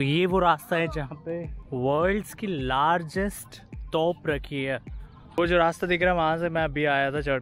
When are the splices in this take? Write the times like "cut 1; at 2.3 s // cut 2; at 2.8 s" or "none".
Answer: cut 1; at 1.6 s // cut 2; at 5.4 s